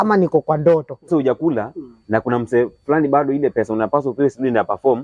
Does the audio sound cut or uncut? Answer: cut